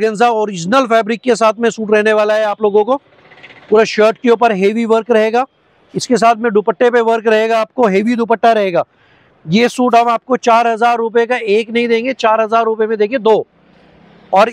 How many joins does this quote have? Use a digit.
0